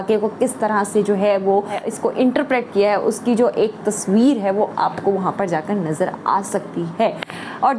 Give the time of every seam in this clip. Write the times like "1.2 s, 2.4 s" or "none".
1.7 s